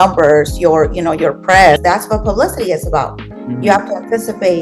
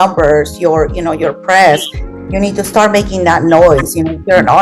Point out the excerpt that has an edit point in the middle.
first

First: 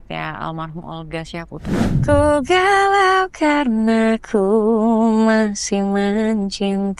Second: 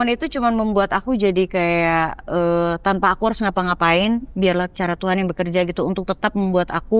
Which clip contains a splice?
first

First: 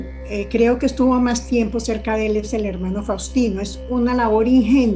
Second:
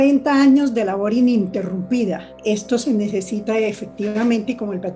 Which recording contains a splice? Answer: second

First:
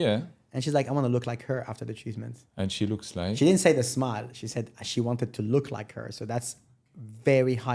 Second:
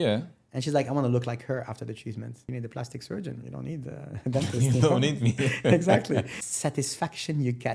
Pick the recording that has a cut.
second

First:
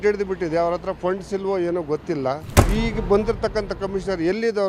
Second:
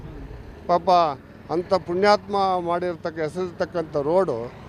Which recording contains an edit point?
first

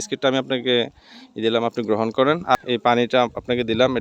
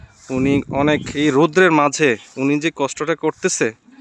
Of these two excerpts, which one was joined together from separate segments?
first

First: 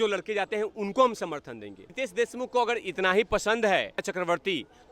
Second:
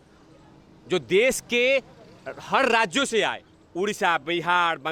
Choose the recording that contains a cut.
first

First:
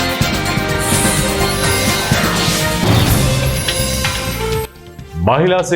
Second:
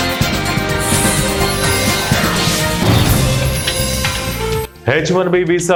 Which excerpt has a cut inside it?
first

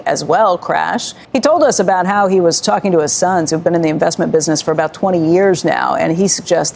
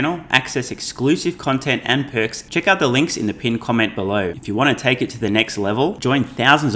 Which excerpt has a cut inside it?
second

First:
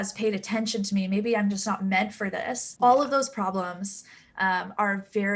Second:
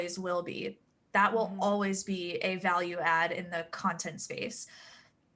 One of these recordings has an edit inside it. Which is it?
first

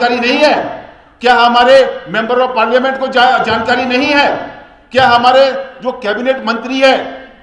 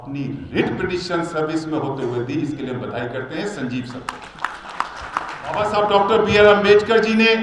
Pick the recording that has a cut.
second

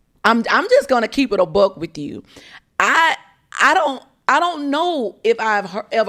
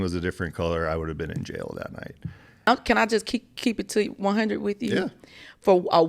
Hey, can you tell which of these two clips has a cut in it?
second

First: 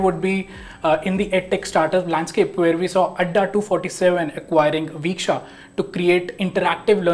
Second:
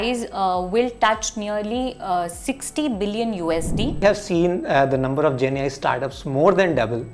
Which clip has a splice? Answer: second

